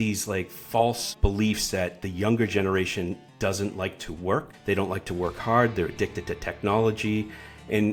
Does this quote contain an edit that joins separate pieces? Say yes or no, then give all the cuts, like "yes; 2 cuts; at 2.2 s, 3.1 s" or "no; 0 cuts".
no; 0 cuts